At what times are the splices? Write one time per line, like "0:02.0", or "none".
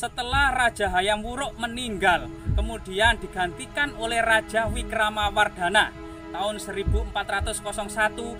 none